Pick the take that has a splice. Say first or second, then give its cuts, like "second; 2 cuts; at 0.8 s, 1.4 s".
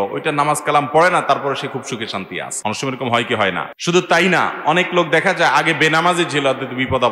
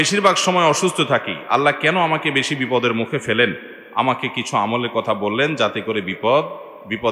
first; 2 cuts; at 2.4 s, 3.7 s